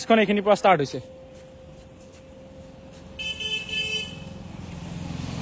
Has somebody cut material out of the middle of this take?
no; 0 cuts

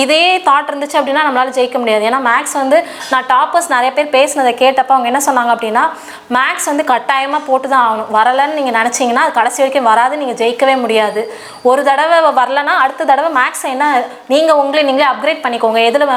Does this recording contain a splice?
no; 0 cuts

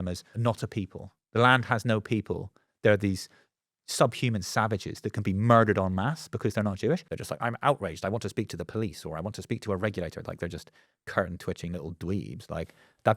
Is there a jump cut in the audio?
yes; 1 cut; at 7.1 s

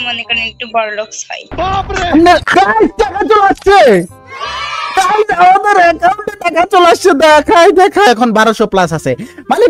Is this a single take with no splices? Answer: no; 2 cuts; at 2.5 s, 8.1 s

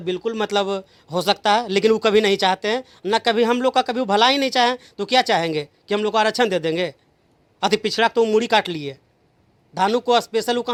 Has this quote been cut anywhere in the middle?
no; 0 cuts

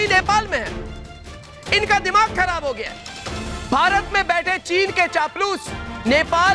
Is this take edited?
no; 0 cuts

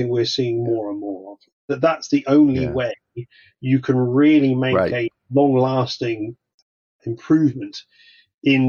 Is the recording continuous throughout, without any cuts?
yes; 0 cuts

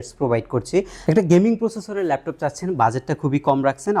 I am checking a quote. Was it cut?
yes; 1 cut; at 1.0 s

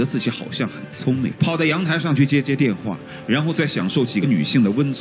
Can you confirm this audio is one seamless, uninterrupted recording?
no; 1 cut; at 1.3 s

